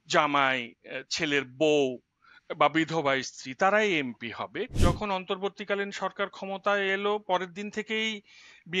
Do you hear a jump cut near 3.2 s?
no; 1 cut; at 4.7 s

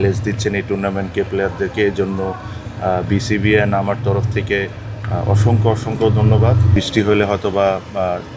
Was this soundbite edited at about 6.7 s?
yes; 1 cut; at 6.7 s

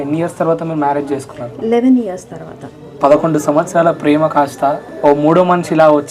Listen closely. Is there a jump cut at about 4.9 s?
yes; 2 cuts; at 2.9 s, 4.9 s

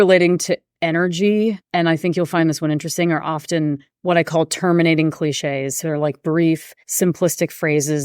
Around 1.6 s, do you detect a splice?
yes; 3 cuts; at 1.6 s, 3.9 s, 6.8 s

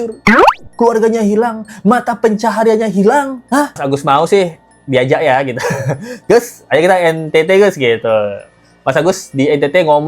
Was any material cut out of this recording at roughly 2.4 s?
no; 1 cut; at 3.8 s

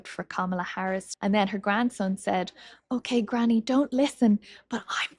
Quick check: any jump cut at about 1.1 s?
yes; 1 cut; at 1.1 s

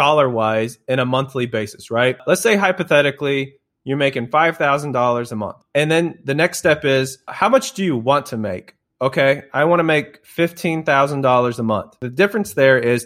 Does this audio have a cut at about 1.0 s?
no; 4 cuts; at 2.2 s, 5.6 s, 7.3 s, 12.0 s

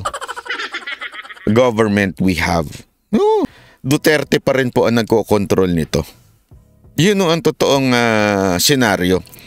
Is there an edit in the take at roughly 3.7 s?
yes; 1 cut; at 3.7 s

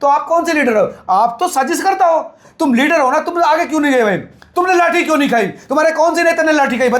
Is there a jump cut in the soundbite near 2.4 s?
yes; 1 cut; at 2.4 s

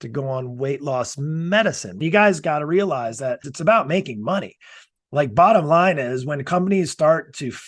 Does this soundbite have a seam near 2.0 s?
yes; 2 cuts; at 2.0 s, 3.5 s

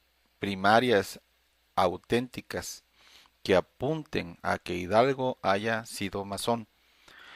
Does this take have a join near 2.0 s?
no; 1 cut; at 4.3 s

